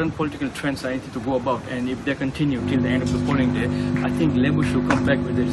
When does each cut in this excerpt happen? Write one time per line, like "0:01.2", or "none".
none

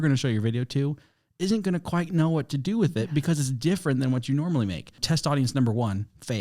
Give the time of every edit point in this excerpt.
0:05.0

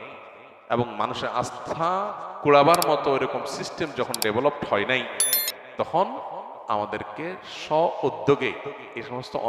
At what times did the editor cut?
none

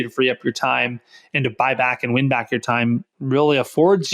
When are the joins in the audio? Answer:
0:03.1

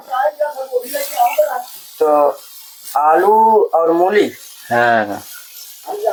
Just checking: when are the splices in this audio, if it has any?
none

